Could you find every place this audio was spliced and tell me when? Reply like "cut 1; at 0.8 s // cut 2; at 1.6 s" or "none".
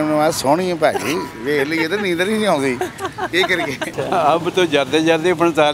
cut 1; at 4.0 s